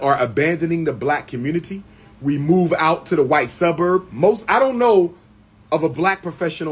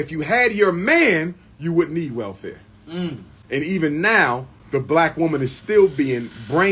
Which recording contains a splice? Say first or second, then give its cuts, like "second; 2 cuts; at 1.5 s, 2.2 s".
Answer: second; 2 cuts; at 3.3 s, 4.5 s